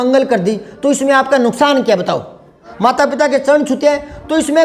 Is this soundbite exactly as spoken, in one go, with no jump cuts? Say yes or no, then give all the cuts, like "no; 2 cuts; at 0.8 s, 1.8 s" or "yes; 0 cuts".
no; 1 cut; at 2.6 s